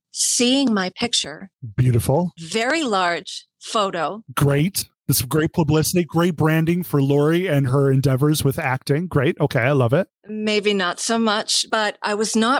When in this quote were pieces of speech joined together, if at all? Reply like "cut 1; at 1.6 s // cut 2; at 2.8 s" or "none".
cut 1; at 11.6 s